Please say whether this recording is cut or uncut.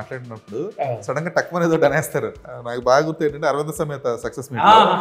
cut